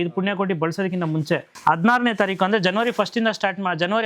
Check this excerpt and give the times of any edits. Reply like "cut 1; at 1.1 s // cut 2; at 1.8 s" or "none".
cut 1; at 1.5 s